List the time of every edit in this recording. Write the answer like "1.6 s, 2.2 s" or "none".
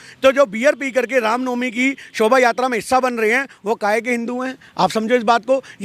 none